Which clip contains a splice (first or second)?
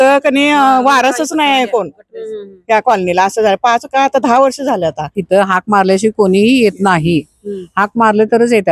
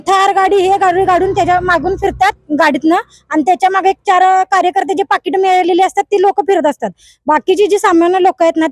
first